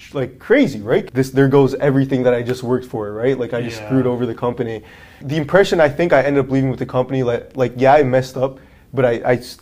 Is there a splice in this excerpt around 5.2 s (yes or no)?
yes